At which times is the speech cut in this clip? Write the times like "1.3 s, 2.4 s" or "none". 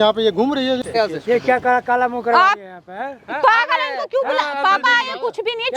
0.9 s